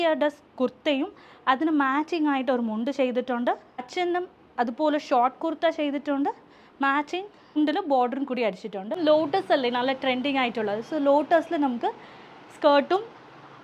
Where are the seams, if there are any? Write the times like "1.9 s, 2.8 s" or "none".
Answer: 9.0 s